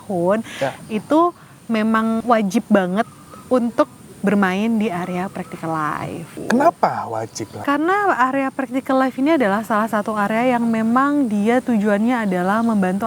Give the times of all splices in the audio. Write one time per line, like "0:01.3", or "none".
0:02.2
0:06.4
0:07.6

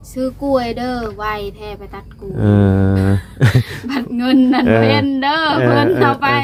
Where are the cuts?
none

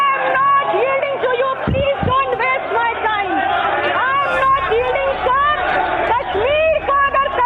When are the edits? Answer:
none

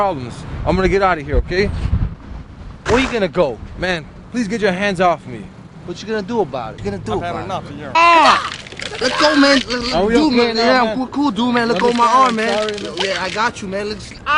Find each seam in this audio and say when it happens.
none

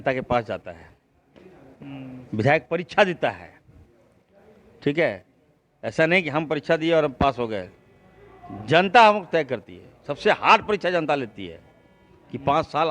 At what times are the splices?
none

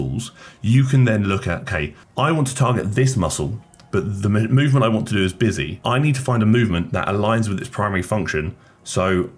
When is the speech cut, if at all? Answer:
none

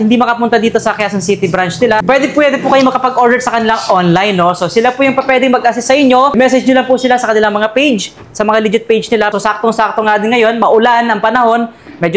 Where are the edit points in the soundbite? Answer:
0:02.0
0:06.3
0:09.3

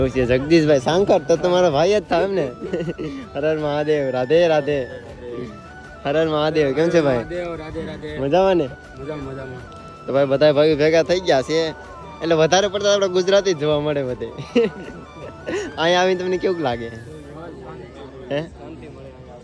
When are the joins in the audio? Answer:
none

